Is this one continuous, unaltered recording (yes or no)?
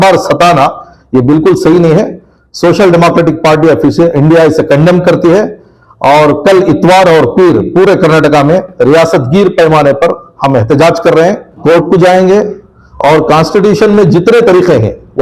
no